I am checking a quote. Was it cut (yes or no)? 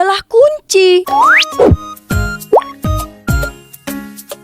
yes